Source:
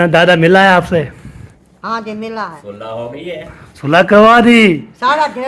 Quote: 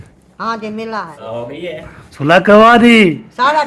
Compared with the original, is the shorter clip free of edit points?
no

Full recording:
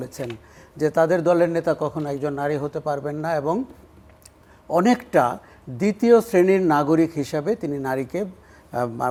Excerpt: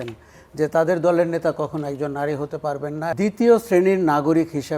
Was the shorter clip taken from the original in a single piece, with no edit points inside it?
no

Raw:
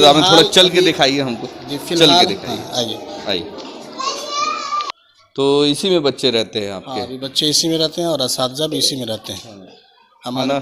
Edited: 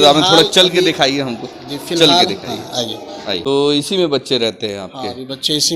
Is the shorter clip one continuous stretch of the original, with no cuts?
no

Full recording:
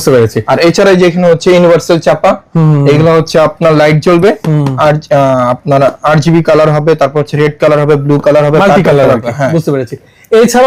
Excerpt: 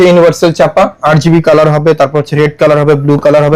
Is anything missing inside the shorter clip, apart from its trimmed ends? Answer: yes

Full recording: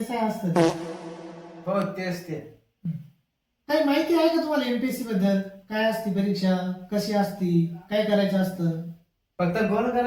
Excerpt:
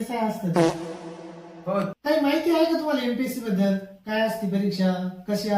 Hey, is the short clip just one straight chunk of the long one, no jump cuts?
no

